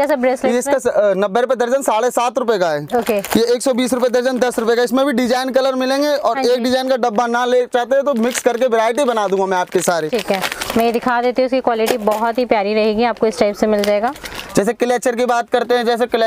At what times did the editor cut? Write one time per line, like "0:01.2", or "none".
none